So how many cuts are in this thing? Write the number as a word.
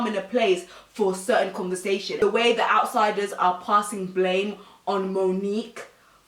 one